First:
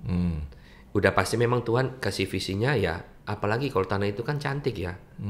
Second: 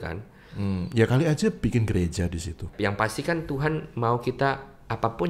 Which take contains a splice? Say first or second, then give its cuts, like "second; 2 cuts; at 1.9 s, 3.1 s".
second; 1 cut; at 2.7 s